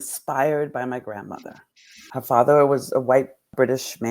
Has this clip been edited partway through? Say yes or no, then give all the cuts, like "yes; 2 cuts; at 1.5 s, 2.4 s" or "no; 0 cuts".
yes; 1 cut; at 2.1 s